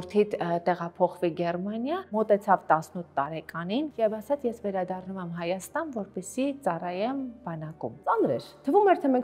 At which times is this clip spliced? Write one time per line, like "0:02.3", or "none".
0:02.1
0:03.9
0:08.1